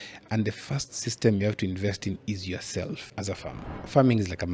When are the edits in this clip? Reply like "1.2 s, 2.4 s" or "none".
3.6 s